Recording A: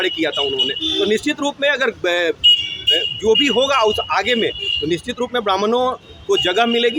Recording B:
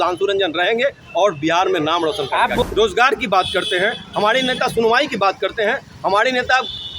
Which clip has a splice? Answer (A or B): B